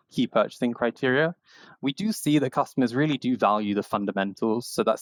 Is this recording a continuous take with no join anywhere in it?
yes; 0 cuts

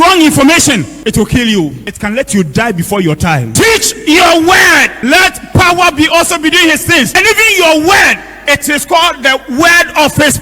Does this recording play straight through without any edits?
no; 5 cuts; at 0.9 s, 1.9 s, 3.5 s, 5.0 s, 7.1 s

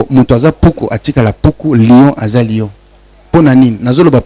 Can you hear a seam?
no; 0 cuts

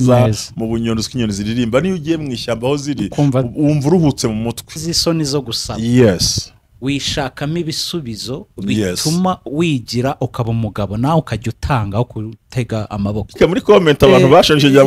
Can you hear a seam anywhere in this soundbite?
yes; 2 cuts; at 4.9 s, 13.4 s

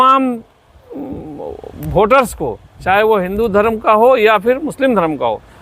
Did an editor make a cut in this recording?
no; 0 cuts

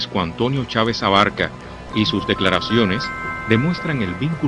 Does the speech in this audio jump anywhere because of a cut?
yes; 1 cut; at 1.4 s

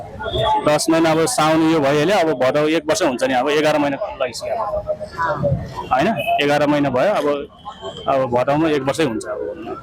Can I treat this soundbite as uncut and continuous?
yes; 0 cuts

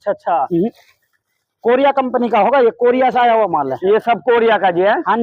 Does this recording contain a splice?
no; 0 cuts

